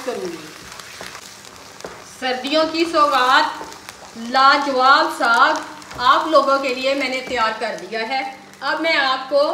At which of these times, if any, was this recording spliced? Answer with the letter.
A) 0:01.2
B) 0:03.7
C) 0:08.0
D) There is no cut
A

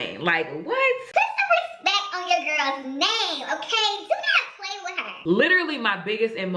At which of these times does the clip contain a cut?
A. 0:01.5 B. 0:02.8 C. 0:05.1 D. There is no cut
C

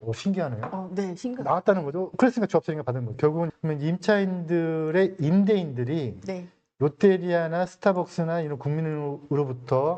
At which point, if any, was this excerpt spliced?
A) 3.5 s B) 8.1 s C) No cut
A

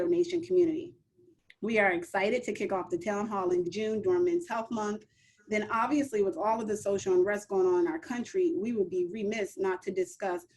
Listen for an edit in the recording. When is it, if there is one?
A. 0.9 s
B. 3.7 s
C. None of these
B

